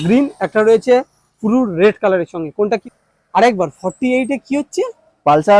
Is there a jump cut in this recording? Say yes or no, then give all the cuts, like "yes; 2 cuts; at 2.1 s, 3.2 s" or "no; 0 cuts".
yes; 1 cut; at 2.8 s